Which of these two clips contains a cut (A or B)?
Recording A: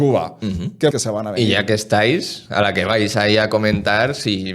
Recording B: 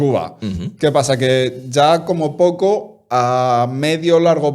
A